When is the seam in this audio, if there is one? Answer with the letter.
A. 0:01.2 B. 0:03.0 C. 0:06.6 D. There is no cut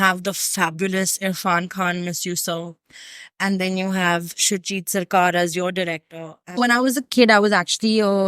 C